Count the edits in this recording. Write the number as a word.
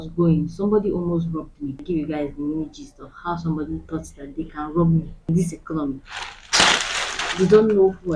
two